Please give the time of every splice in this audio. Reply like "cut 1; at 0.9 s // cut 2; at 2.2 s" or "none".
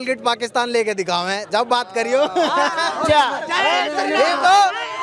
none